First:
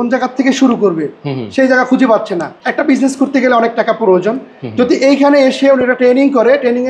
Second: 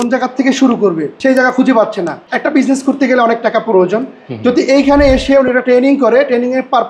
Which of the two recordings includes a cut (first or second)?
second